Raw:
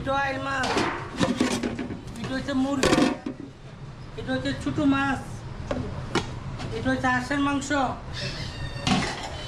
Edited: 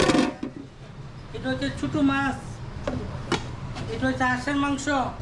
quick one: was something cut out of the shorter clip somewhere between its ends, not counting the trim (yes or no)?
no